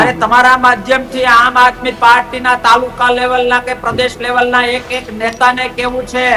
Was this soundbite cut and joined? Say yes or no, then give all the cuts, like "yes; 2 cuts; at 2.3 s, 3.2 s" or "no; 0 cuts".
no; 0 cuts